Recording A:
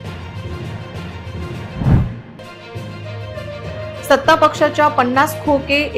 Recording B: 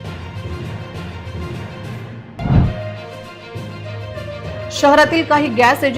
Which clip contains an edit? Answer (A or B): A